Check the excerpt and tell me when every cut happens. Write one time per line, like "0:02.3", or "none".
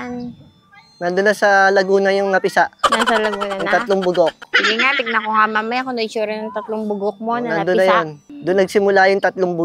0:08.2